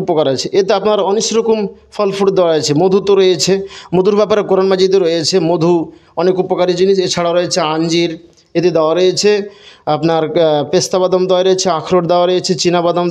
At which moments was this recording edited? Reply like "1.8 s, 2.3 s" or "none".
none